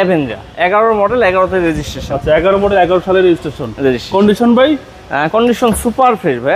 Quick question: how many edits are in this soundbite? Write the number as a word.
zero